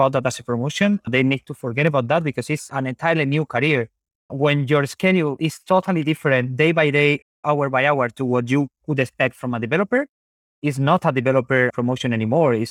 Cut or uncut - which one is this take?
uncut